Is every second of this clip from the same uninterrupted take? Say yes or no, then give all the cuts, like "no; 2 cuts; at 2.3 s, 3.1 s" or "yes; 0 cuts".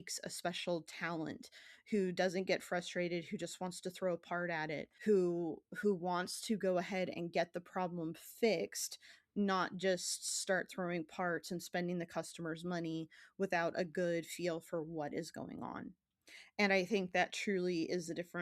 no; 1 cut; at 4.9 s